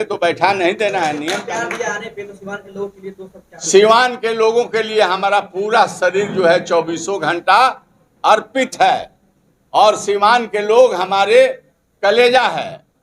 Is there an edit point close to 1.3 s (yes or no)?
yes